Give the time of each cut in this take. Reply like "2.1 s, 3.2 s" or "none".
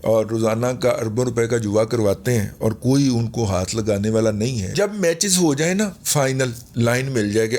4.7 s, 6.7 s

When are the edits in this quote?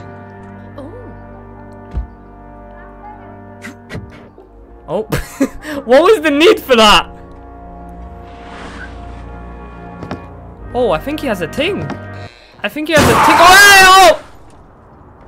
none

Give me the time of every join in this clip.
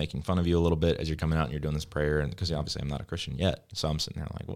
none

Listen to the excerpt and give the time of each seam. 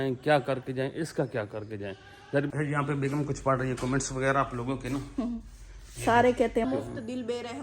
2.5 s, 6.6 s

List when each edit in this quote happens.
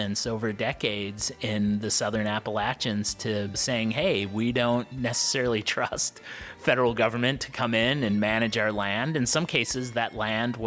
none

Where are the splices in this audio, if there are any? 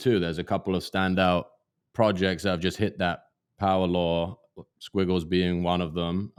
none

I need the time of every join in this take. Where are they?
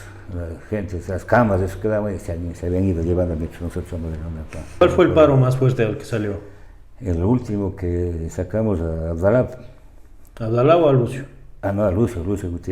4.8 s

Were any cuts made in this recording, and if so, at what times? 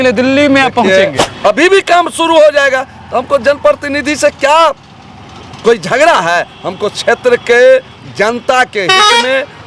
1.3 s

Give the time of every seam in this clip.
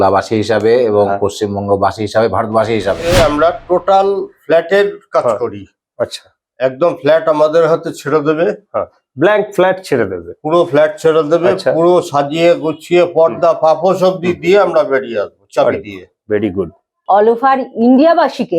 3.0 s, 16.9 s

